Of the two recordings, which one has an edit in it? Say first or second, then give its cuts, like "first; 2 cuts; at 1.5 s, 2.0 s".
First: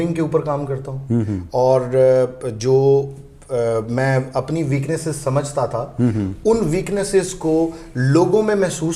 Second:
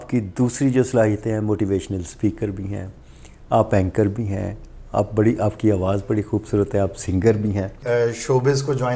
second; 1 cut; at 7.8 s